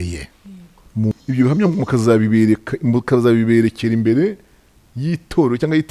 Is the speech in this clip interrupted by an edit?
yes; 1 cut; at 1.1 s

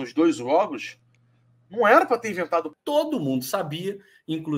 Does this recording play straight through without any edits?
no; 1 cut; at 2.8 s

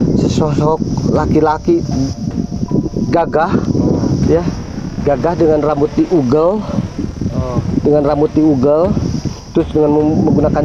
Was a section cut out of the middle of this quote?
no; 0 cuts

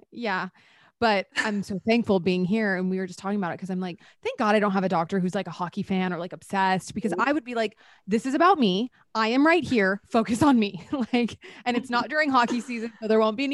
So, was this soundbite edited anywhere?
no; 0 cuts

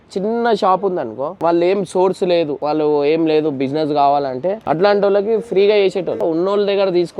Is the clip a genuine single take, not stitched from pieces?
no; 4 cuts; at 1.4 s, 2.6 s, 4.6 s, 6.2 s

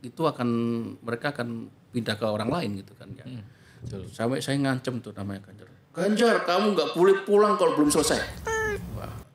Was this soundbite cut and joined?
no; 0 cuts

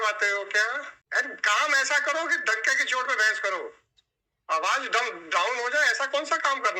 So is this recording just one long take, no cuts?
no; 1 cut; at 0.9 s

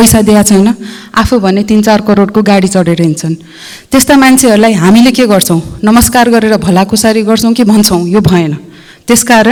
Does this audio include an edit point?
no; 0 cuts

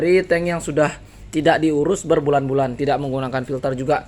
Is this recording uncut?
yes; 0 cuts

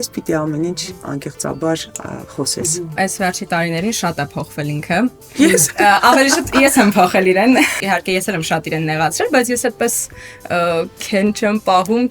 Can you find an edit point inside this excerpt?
yes; 2 cuts; at 2.9 s, 7.7 s

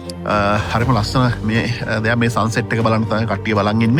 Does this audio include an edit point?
no; 0 cuts

